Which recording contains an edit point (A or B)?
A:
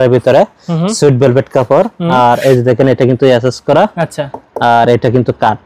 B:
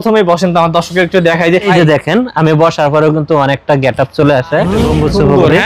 B